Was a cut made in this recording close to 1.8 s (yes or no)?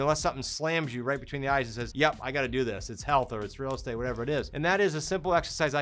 yes